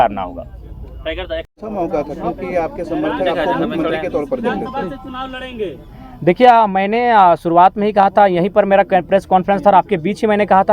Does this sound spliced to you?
no; 0 cuts

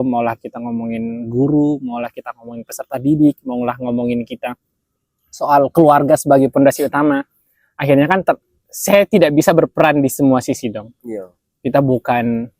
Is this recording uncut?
yes; 0 cuts

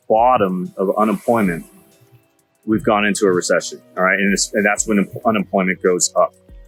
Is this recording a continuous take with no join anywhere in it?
yes; 0 cuts

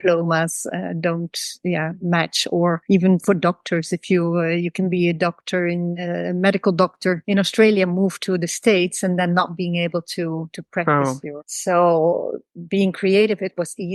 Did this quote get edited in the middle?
no; 0 cuts

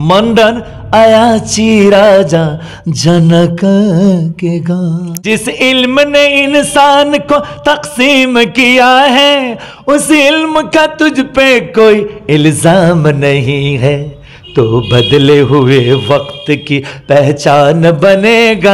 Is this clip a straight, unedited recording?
no; 1 cut; at 5.1 s

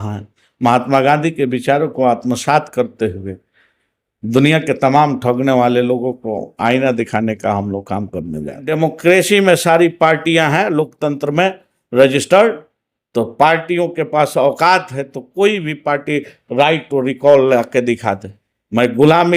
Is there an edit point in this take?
yes; 1 cut; at 8.7 s

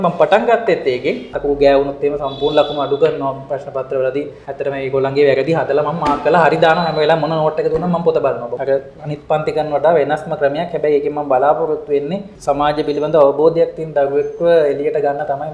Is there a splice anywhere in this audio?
yes; 4 cuts; at 1.3 s, 4.4 s, 8.5 s, 12.3 s

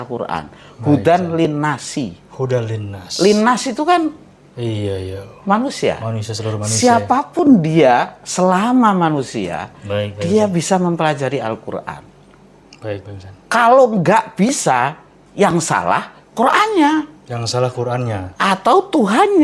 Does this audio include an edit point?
no; 0 cuts

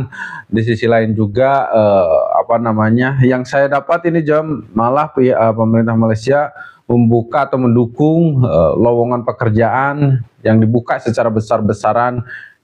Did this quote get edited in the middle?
no; 0 cuts

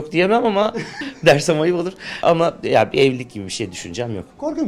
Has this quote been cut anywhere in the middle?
yes; 2 cuts; at 0.9 s, 2.2 s

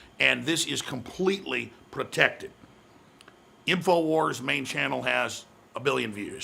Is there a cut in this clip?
no; 0 cuts

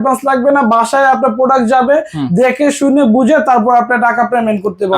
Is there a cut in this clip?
no; 0 cuts

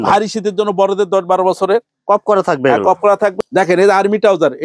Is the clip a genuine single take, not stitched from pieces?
no; 1 cut; at 3.3 s

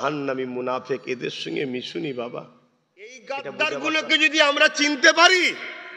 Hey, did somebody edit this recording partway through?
yes; 1 cut; at 3.2 s

